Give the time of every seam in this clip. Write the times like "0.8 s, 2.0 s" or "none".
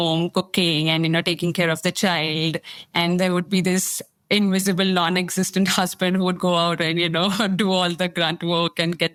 none